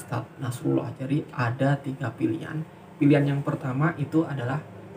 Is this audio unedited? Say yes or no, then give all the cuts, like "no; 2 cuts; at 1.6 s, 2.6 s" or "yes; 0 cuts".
yes; 0 cuts